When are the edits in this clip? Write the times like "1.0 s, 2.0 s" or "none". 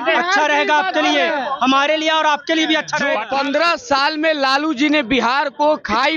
3.2 s